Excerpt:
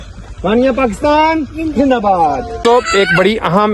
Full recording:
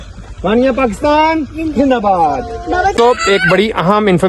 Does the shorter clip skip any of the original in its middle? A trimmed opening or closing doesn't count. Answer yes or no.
yes